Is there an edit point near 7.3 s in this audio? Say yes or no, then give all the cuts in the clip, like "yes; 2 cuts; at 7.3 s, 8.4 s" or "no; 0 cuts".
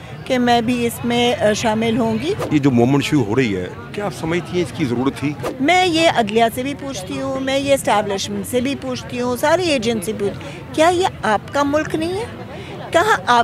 no; 2 cuts; at 2.4 s, 5.4 s